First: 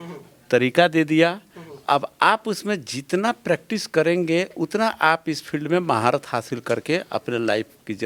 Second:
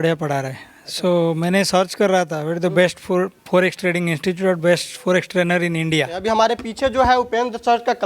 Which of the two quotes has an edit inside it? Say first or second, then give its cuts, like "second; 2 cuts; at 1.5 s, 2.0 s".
second; 1 cut; at 6.2 s